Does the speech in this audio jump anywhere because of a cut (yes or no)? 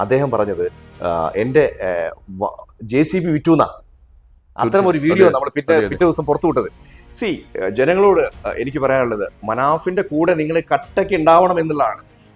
no